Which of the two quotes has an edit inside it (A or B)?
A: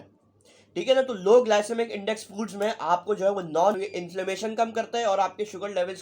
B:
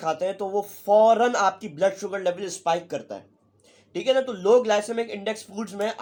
A